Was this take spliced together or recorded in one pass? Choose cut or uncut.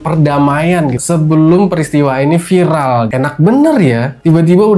cut